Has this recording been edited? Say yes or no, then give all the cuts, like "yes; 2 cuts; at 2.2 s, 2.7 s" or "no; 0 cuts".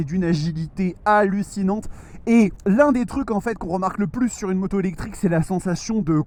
no; 0 cuts